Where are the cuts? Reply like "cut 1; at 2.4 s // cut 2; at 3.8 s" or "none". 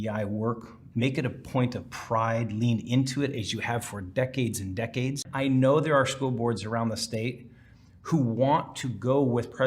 cut 1; at 5.3 s